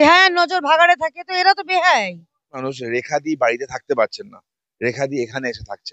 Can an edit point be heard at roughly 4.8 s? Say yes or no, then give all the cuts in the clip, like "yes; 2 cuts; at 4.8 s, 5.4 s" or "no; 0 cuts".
no; 1 cut; at 2.7 s